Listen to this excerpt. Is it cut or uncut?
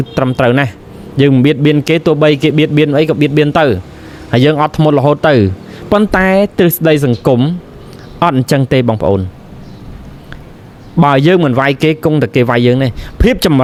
uncut